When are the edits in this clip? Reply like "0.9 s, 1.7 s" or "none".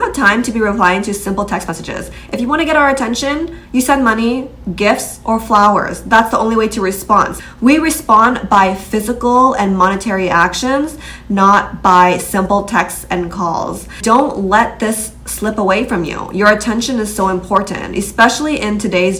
none